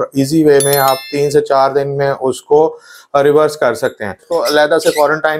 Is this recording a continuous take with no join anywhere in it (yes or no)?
no